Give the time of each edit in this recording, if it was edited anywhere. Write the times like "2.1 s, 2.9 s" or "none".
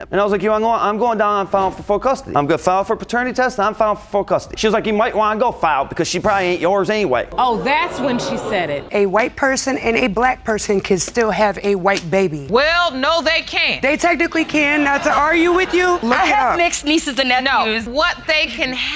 8.9 s